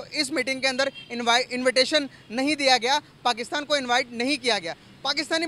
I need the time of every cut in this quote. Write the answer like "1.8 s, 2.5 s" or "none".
none